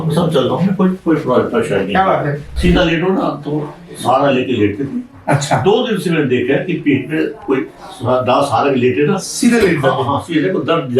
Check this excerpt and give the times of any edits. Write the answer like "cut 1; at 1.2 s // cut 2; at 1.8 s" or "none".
cut 1; at 2.5 s